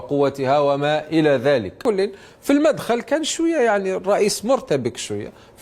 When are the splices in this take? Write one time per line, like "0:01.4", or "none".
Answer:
0:01.8